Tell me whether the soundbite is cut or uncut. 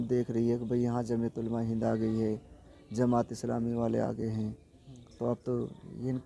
uncut